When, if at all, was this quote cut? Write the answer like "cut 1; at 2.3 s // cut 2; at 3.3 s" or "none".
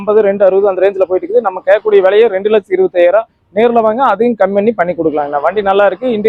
none

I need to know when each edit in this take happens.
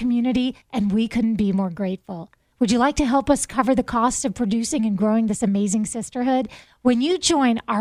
none

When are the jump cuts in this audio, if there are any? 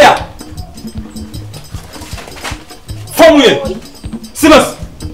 none

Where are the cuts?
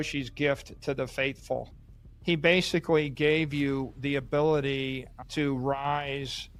none

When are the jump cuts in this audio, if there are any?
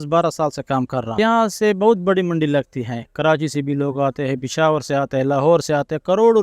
cut 1; at 1.2 s

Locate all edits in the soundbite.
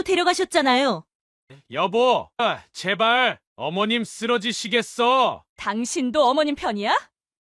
cut 1; at 1.1 s

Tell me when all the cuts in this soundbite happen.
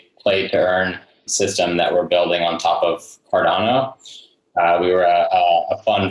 cut 1; at 1.3 s

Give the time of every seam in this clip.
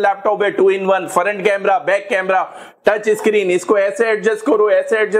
none

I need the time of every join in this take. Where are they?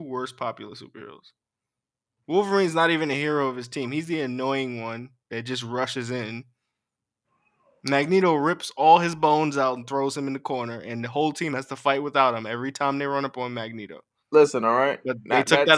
none

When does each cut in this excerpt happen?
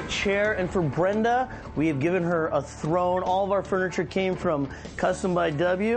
none

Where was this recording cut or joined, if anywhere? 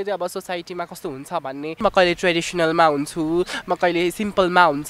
cut 1; at 1.8 s

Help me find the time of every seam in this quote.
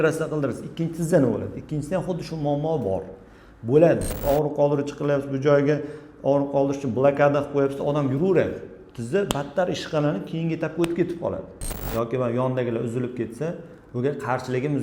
cut 1; at 4.1 s // cut 2; at 11.7 s

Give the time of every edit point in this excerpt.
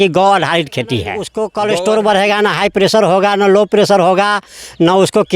cut 1; at 1.3 s

